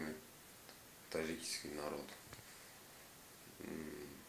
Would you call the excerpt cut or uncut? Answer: cut